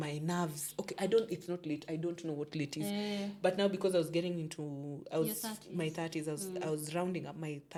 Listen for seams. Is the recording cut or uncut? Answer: uncut